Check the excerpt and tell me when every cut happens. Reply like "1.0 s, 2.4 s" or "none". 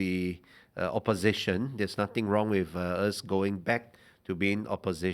none